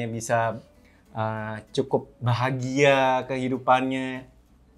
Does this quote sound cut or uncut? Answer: uncut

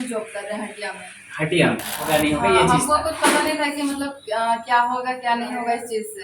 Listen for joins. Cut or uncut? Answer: cut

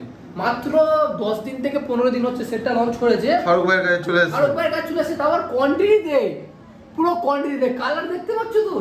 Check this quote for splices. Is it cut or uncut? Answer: uncut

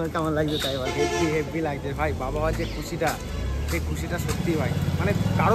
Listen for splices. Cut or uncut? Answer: uncut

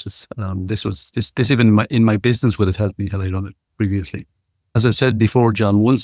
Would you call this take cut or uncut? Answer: cut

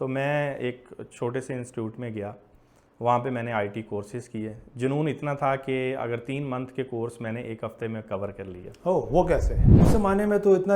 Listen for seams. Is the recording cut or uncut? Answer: cut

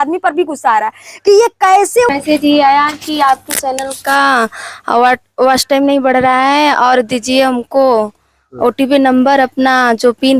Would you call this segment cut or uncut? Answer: cut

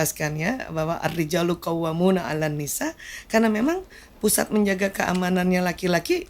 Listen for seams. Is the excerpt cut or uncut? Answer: uncut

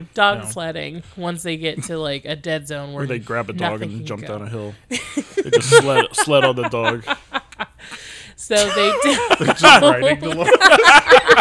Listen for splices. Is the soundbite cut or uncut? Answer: uncut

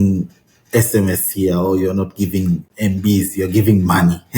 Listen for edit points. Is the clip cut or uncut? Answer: cut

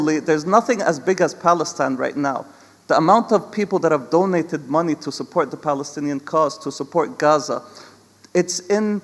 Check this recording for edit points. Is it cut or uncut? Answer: uncut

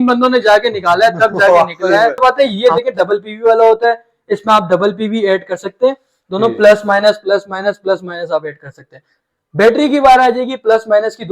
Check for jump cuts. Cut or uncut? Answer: cut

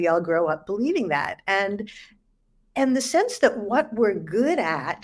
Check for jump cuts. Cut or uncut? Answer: uncut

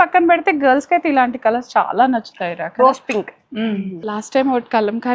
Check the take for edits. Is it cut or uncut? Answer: cut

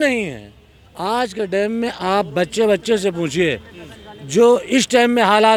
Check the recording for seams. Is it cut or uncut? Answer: uncut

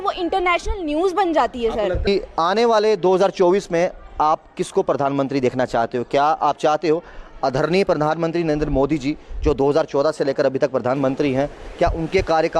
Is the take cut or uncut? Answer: cut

